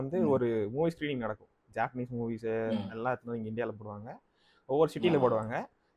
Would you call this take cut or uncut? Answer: uncut